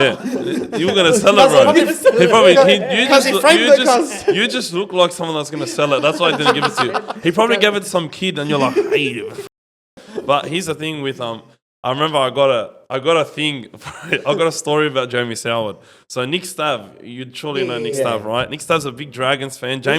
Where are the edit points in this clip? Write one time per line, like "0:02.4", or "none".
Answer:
none